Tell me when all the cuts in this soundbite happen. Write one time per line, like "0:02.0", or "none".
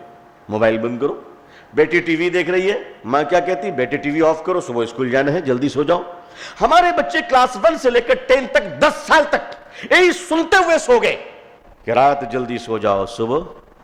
none